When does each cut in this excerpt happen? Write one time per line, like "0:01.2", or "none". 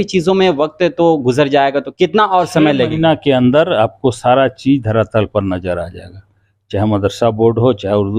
0:01.9